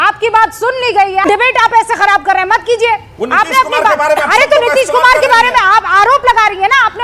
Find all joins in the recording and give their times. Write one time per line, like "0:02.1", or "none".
0:01.2